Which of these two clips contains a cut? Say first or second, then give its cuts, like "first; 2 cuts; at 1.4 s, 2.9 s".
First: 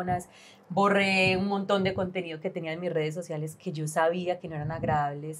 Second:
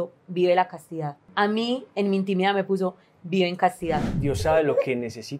second; 2 cuts; at 1.2 s, 4.1 s